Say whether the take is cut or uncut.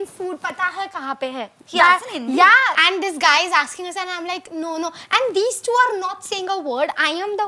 cut